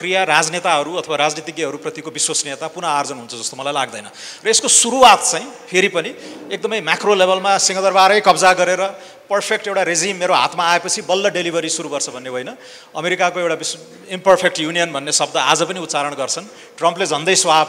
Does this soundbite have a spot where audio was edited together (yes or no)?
no